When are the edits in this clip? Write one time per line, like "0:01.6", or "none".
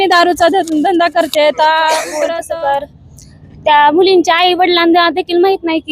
0:02.4